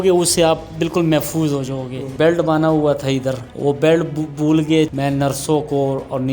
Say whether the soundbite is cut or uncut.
cut